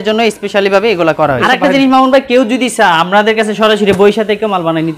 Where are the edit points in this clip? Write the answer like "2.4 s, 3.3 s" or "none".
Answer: 1.4 s